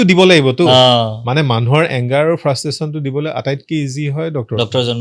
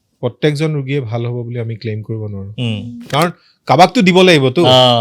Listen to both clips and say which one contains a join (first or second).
second